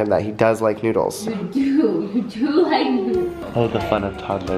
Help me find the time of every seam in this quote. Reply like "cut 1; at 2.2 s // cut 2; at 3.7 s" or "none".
cut 1; at 3.4 s